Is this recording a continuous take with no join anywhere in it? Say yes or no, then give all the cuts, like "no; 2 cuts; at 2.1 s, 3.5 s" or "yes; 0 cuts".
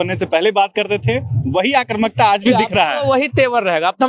yes; 0 cuts